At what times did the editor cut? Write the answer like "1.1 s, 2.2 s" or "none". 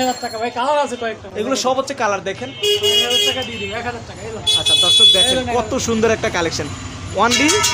none